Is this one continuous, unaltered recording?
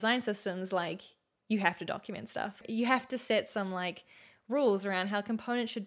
no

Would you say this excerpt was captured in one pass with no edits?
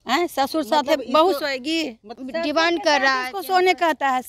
no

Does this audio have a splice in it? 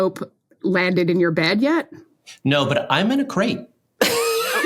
no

